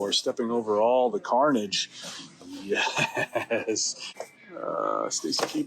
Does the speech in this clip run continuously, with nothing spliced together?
no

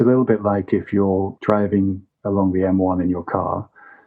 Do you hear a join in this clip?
yes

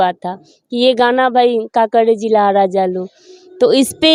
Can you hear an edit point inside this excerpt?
no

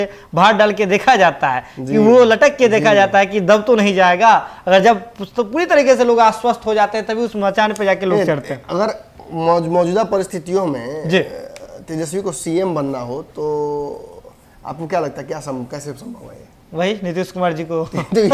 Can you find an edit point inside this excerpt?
no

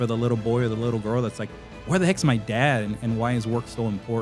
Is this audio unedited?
yes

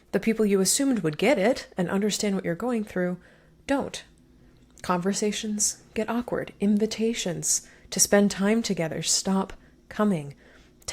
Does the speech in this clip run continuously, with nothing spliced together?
yes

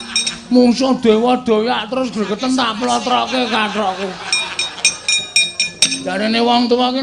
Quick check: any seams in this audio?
no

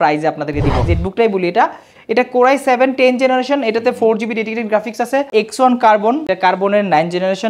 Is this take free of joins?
no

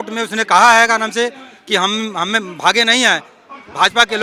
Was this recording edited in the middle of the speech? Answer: no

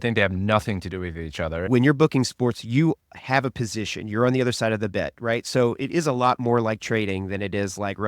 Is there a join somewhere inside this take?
yes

